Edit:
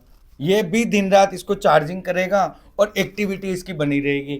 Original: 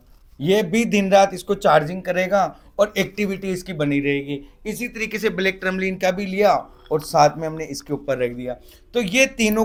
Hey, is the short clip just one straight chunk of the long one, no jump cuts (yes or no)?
yes